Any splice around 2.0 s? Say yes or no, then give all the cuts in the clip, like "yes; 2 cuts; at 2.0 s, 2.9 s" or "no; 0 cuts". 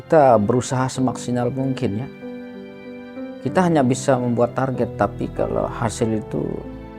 yes; 2 cuts; at 2.0 s, 3.4 s